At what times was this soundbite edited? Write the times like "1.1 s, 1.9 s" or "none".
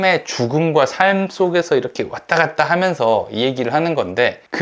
none